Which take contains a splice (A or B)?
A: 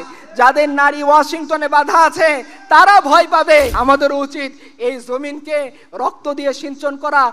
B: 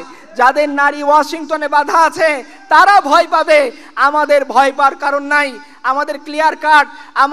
A